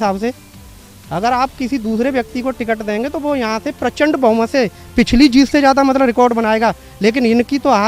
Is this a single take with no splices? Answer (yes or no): yes